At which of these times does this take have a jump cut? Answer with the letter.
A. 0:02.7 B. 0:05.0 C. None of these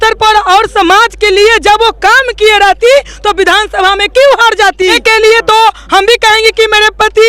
B